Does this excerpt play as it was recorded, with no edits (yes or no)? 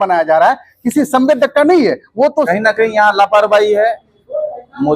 no